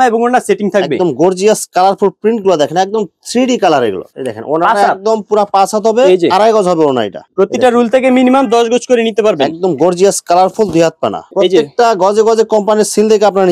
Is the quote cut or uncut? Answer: cut